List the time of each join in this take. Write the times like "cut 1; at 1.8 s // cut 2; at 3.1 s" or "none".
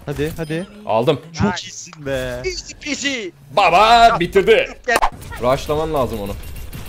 cut 1; at 5.0 s

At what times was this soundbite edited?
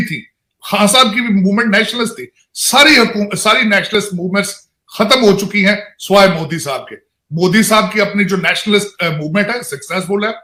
none

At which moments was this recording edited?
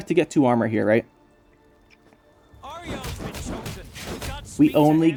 none

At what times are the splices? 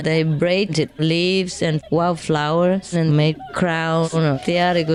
none

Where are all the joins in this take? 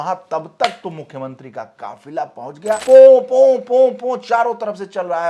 cut 1; at 2.8 s

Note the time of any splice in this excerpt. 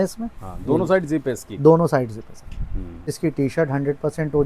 cut 1; at 3.1 s

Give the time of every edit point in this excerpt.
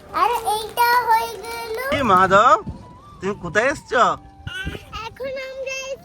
cut 1; at 1.8 s

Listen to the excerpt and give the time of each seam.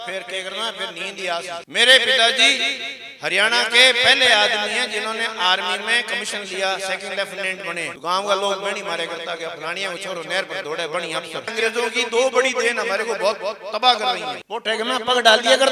cut 1; at 1.7 s // cut 2; at 7.9 s // cut 3; at 11.5 s // cut 4; at 14.4 s

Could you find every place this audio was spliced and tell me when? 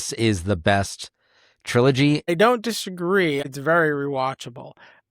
cut 1; at 2.3 s // cut 2; at 3.5 s

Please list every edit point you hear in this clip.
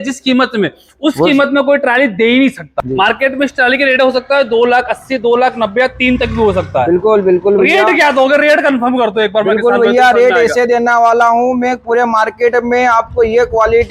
cut 1; at 2.8 s

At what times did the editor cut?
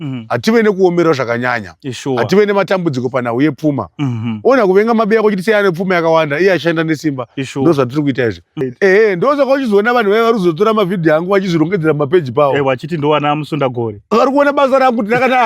cut 1; at 8.6 s

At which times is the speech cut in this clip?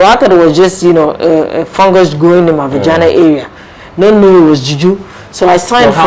none

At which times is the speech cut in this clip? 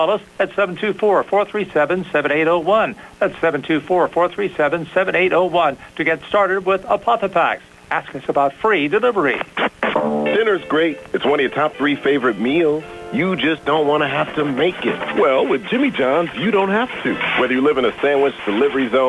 cut 1; at 7.4 s // cut 2; at 9.4 s

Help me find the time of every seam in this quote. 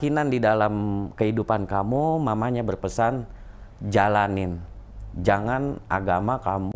none

